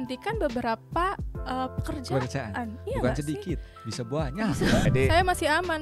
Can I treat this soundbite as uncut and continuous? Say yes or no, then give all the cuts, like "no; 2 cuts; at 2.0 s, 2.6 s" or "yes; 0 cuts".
no; 1 cut; at 4.9 s